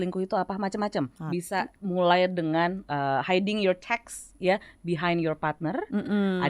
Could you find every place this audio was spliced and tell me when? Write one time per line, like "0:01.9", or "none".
0:01.4